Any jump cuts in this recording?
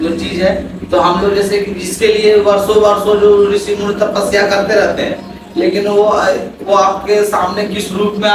no; 0 cuts

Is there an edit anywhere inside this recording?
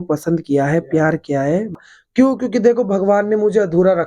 yes; 1 cut; at 1.7 s

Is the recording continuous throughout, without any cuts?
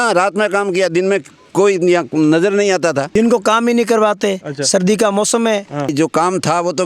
no; 2 cuts; at 3.1 s, 5.9 s

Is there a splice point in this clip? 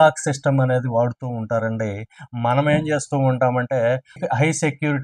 no; 0 cuts

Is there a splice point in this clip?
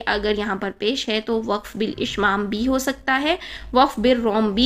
no; 0 cuts

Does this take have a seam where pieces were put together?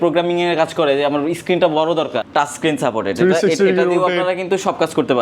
yes; 1 cut; at 2.2 s

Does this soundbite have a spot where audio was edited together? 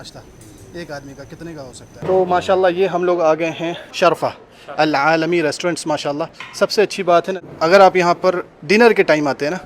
yes; 1 cut; at 1.9 s

